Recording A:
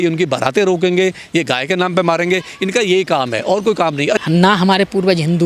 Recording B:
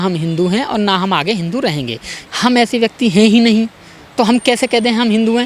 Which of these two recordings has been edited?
A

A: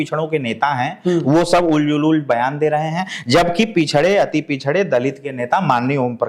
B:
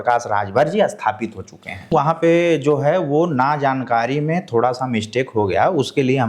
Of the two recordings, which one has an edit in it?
B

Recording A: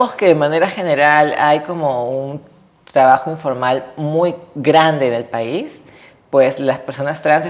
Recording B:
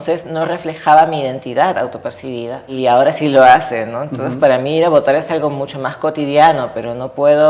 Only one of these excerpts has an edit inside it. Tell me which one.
B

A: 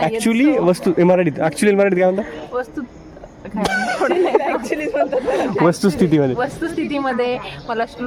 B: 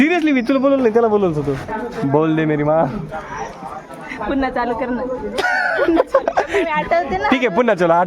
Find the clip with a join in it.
B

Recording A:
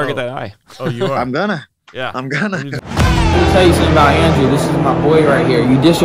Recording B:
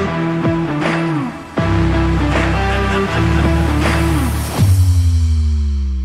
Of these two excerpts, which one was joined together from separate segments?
A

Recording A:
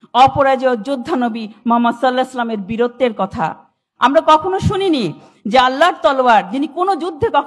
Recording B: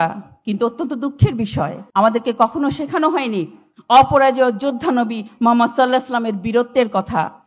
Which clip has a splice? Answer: B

